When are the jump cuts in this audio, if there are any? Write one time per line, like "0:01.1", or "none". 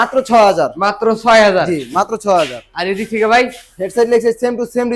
none